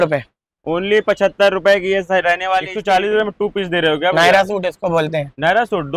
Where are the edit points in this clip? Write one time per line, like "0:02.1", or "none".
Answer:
0:02.7